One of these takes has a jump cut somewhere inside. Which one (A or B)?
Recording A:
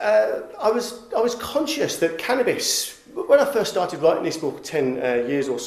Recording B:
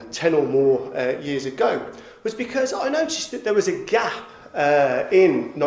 B